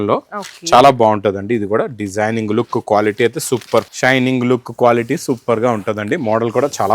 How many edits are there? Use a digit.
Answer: 1